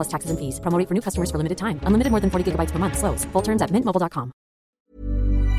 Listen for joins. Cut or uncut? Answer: cut